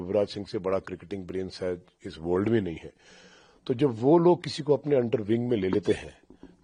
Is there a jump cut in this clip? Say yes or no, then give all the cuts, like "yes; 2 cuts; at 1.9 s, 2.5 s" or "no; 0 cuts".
no; 0 cuts